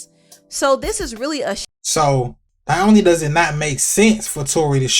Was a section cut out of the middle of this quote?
yes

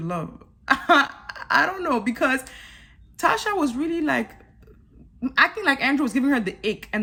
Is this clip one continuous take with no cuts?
yes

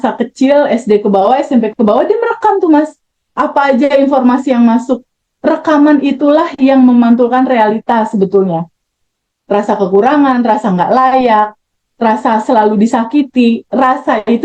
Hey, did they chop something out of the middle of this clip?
no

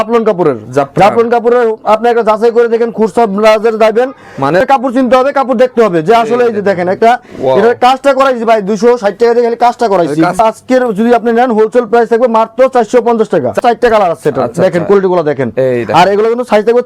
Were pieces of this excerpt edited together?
yes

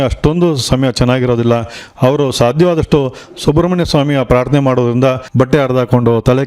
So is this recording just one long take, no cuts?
no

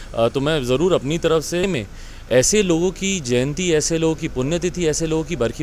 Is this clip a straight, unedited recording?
no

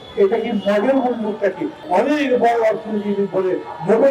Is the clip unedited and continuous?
no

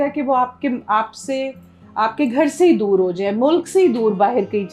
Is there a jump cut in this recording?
no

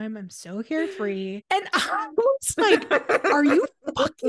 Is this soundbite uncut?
no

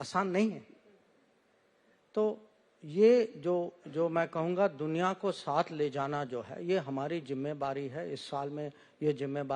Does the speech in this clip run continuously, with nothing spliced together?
yes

